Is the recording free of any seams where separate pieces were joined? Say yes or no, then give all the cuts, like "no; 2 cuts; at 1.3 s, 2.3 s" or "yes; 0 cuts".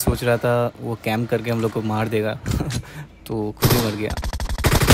yes; 0 cuts